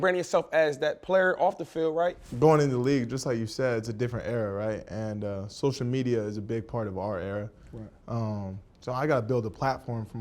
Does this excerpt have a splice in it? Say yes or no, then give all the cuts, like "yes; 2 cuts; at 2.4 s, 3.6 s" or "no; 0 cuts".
yes; 1 cut; at 2.2 s